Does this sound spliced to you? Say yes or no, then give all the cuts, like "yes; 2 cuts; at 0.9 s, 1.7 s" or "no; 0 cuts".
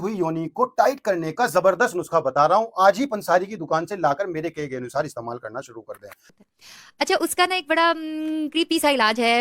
yes; 1 cut; at 6.4 s